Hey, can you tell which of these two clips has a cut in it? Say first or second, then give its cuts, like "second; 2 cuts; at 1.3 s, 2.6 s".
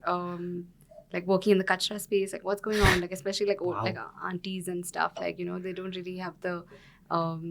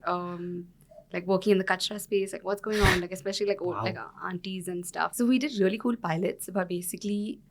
second; 1 cut; at 5.1 s